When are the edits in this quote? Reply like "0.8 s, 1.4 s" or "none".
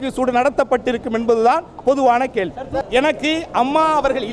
2.8 s